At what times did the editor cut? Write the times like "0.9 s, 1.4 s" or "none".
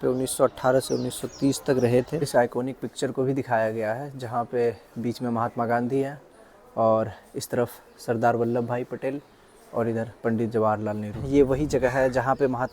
2.3 s, 11.1 s